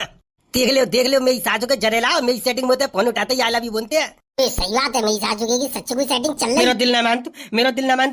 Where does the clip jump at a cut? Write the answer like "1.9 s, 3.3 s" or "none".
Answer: 6.6 s